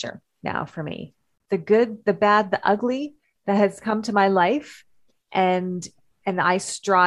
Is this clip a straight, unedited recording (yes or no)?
no